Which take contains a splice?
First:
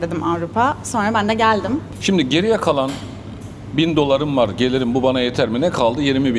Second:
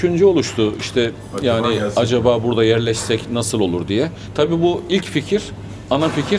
first; 1 cut; at 1.9 s

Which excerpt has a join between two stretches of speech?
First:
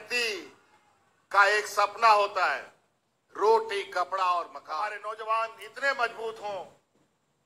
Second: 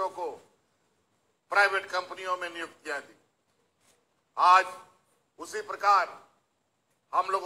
first; 1 cut; at 4.6 s

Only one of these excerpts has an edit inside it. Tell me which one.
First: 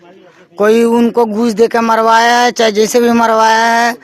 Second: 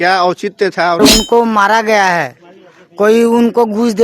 second; 1 cut; at 1.0 s

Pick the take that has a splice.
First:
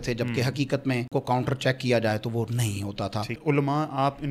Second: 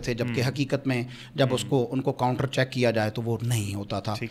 first; 2 cuts; at 1.1 s, 3.4 s

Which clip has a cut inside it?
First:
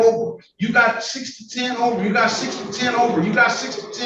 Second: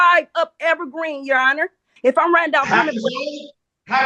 second; 1 cut; at 1.9 s

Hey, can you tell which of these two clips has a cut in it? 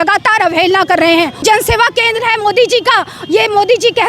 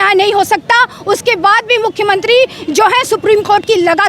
first; 1 cut; at 1.4 s

